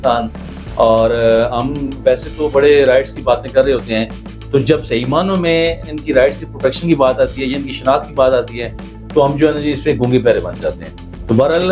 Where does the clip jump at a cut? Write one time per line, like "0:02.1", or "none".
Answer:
none